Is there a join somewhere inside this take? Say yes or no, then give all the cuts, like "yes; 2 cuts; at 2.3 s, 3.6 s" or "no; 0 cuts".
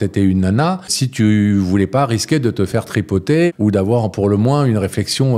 yes; 2 cuts; at 1.0 s, 3.5 s